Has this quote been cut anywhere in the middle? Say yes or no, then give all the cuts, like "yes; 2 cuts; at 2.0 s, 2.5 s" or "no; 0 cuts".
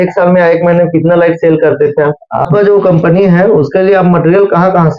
yes; 1 cut; at 2.5 s